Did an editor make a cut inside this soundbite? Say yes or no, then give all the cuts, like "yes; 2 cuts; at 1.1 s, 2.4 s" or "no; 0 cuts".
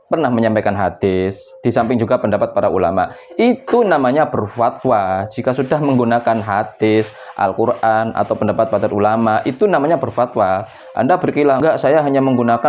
yes; 1 cut; at 11.6 s